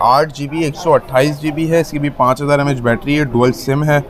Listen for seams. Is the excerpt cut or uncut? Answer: uncut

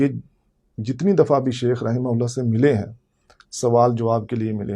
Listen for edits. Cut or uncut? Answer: uncut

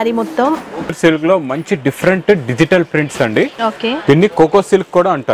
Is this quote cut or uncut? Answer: cut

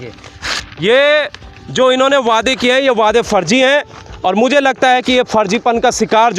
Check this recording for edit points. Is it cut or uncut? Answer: uncut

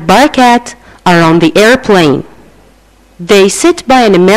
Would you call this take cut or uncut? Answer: uncut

